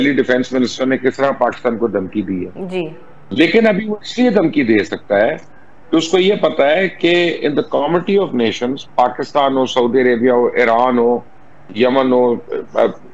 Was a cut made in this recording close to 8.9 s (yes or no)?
no